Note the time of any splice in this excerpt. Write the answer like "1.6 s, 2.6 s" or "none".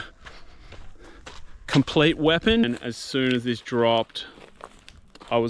2.6 s